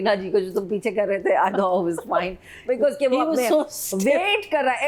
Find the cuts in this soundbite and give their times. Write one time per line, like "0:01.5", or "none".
none